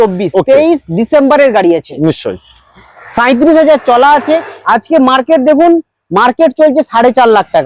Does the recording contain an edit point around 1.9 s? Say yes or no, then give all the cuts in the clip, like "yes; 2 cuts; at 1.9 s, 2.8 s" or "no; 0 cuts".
no; 0 cuts